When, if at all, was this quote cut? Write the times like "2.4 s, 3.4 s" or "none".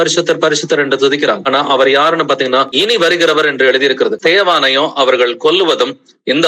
1.4 s, 2.7 s, 4.2 s